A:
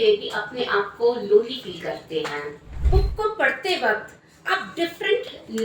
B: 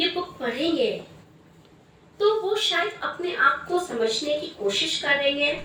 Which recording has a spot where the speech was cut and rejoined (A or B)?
A